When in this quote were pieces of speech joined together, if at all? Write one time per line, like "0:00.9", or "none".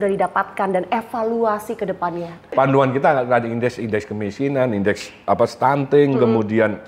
0:02.4